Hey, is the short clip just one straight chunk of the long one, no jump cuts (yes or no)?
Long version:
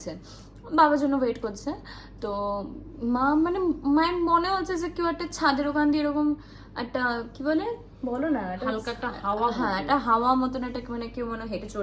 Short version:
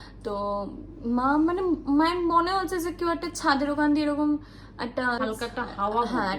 no